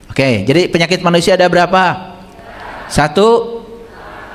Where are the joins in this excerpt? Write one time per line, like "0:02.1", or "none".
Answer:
none